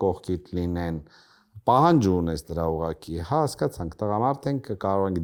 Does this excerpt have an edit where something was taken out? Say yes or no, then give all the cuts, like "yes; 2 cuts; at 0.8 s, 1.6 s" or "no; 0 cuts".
no; 0 cuts